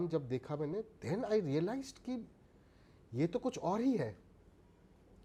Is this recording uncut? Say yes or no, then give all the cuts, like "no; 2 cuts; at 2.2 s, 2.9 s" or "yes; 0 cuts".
yes; 0 cuts